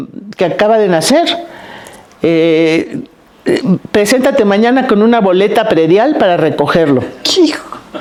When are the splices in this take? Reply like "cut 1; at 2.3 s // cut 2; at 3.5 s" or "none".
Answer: none